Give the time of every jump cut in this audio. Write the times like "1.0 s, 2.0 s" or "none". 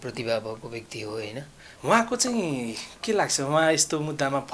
1.6 s